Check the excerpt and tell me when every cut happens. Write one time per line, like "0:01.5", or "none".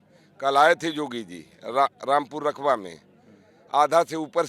none